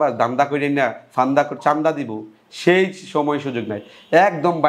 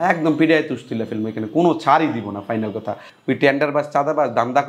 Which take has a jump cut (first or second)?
second